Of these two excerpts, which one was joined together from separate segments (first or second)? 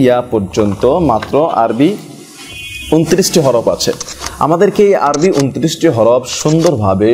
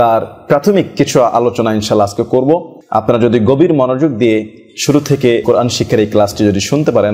second